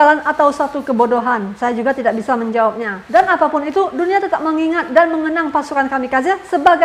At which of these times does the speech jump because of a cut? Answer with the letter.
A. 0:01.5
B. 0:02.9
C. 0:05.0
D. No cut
B